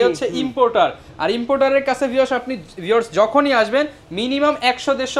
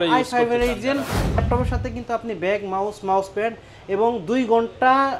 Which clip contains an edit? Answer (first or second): second